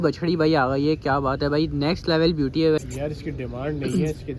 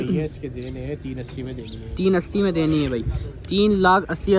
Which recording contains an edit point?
first; 1 cut; at 2.8 s

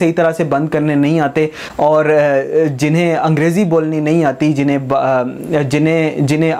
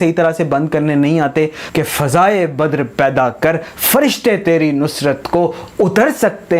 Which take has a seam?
second; 1 cut; at 1.6 s

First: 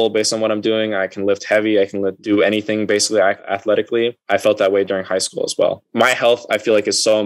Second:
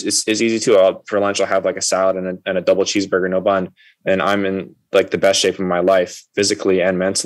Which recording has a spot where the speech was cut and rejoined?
first; 3 cuts; at 2.2 s, 3.4 s, 5.8 s

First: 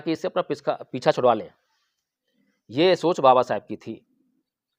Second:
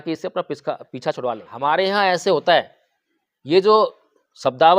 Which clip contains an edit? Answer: second; 1 cut; at 1.5 s

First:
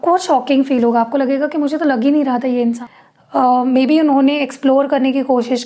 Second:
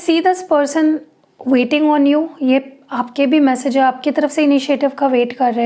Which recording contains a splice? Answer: first; 1 cut; at 2.8 s

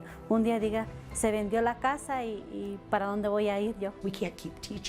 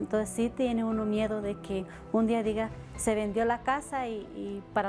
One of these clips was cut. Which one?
first; 1 cut; at 4.0 s

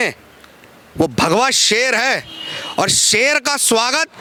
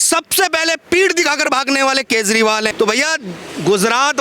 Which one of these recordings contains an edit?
second; 1 cut; at 2.7 s

